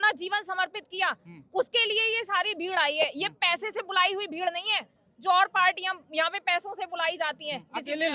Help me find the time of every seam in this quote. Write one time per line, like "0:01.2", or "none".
none